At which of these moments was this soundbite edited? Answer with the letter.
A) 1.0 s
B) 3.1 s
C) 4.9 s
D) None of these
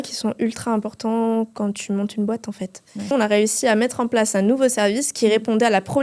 B